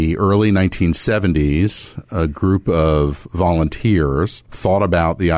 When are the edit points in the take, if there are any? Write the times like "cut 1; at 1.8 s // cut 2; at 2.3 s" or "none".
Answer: cut 1; at 4.4 s